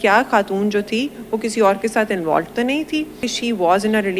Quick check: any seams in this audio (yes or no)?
yes